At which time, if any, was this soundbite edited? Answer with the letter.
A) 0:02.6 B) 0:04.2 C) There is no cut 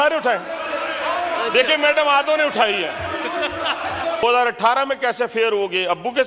B